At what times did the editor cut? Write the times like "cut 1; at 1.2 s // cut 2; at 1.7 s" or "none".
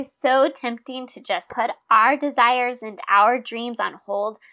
cut 1; at 1.7 s